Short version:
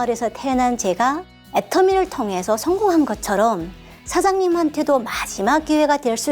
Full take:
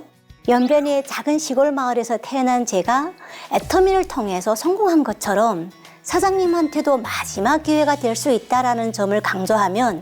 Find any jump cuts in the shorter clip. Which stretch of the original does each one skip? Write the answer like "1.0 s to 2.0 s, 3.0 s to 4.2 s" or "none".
3.2 s to 3.3 s